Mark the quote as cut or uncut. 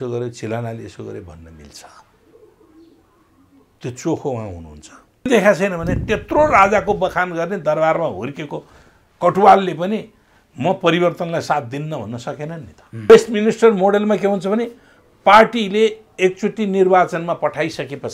cut